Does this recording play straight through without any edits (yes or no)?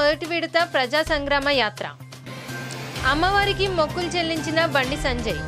yes